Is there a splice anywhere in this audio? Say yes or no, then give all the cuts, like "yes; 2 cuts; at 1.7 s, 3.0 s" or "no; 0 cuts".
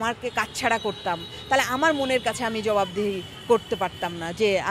no; 0 cuts